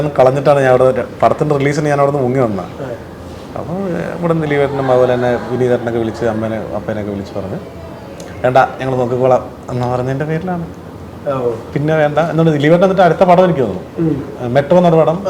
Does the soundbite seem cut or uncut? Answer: uncut